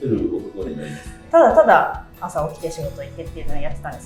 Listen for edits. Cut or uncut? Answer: cut